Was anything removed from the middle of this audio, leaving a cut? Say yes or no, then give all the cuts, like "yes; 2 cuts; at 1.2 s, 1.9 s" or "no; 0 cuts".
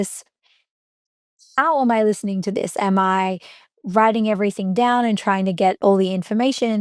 yes; 1 cut; at 5.8 s